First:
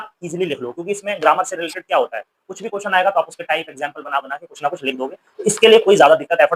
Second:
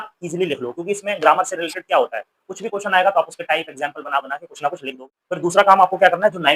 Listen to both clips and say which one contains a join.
second; 1 cut; at 5.2 s

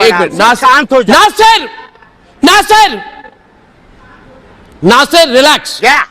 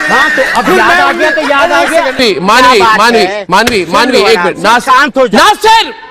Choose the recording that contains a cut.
second; 1 cut; at 2.2 s

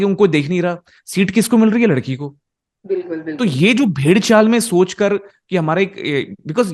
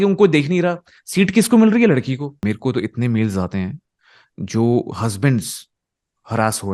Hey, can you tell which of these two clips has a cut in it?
second; 1 cut; at 2.4 s

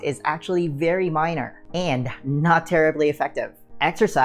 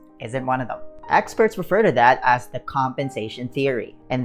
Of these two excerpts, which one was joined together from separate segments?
second; 1 cut; at 0.9 s

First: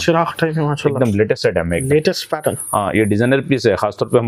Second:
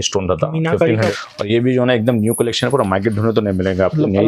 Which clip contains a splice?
second; 1 cut; at 1.1 s

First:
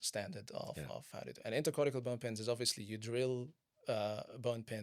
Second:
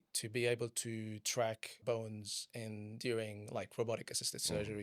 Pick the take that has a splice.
second; 1 cut; at 1.8 s

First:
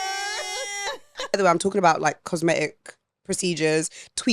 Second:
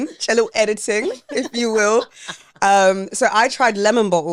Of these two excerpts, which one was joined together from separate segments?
first; 1 cut; at 1.4 s

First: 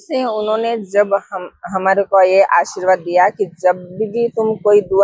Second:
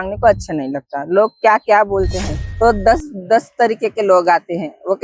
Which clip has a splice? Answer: second; 1 cut; at 2.4 s

